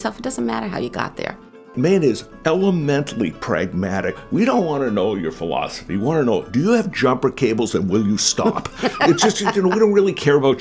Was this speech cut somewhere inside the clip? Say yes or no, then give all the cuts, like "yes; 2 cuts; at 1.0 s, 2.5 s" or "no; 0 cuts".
yes; 4 cuts; at 1.7 s, 2.3 s, 4.2 s, 6.5 s